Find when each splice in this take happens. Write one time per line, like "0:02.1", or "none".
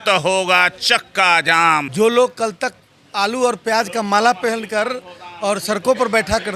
0:01.9